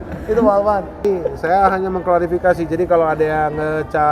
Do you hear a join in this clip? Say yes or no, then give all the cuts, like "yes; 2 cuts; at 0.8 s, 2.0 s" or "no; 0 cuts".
yes; 1 cut; at 1.0 s